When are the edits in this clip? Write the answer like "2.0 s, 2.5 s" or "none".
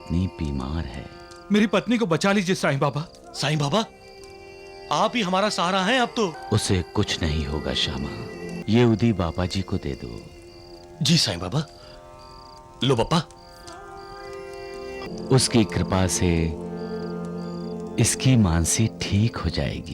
6.4 s, 8.6 s, 15.1 s